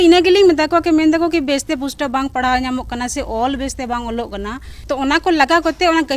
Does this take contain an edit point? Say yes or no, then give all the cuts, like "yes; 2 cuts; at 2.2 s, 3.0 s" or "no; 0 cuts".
yes; 1 cut; at 4.7 s